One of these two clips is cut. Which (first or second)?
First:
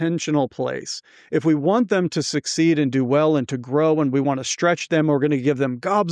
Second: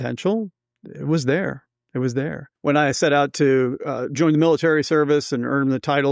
second